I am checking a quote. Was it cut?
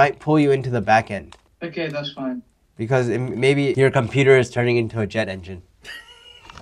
yes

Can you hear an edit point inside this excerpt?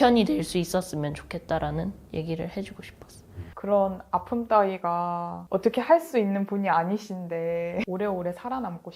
yes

